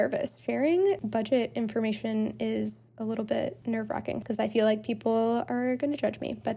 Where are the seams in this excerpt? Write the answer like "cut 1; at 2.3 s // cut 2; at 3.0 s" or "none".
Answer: cut 1; at 1.0 s // cut 2; at 3.9 s